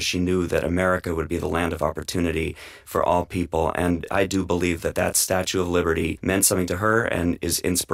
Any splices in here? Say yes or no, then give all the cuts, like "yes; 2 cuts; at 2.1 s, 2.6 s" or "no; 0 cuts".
yes; 2 cuts; at 4.1 s, 6.2 s